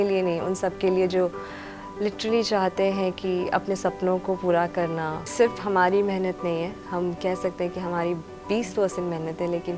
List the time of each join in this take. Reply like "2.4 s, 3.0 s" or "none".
5.3 s